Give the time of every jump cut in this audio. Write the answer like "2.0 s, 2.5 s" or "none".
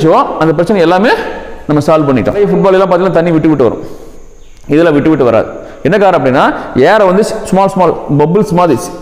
2.4 s